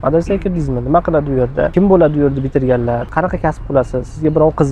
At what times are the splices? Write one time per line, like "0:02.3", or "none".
0:01.7
0:03.1

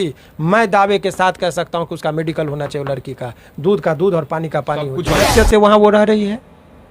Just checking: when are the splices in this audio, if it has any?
0:05.3

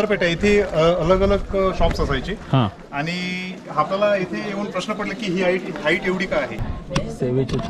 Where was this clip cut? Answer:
0:06.5

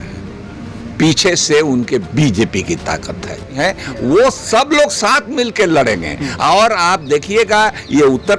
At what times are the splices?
0:03.6

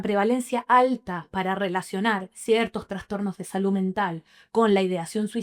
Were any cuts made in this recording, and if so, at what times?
none

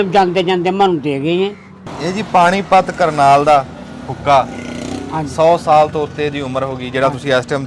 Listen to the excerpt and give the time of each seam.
0:01.7

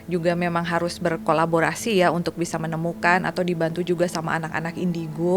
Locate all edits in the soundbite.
none

